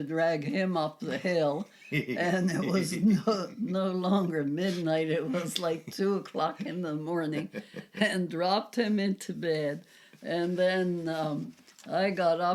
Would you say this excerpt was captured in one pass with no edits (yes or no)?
yes